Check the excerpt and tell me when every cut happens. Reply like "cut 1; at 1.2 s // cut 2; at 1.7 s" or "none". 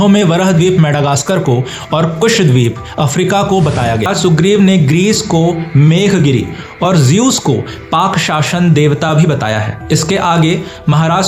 cut 1; at 4.1 s